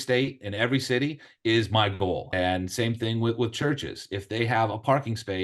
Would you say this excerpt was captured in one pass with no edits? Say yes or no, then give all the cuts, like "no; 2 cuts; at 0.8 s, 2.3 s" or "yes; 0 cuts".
no; 1 cut; at 2.3 s